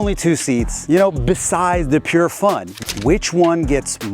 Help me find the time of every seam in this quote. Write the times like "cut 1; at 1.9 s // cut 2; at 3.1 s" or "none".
cut 1; at 2.7 s